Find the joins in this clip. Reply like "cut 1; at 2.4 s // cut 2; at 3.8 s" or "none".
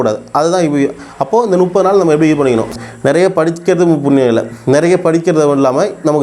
cut 1; at 2.7 s